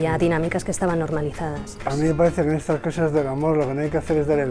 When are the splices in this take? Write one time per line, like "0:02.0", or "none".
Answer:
0:01.8